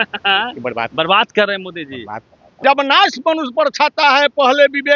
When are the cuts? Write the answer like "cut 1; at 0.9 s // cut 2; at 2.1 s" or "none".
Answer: cut 1; at 0.9 s // cut 2; at 2.4 s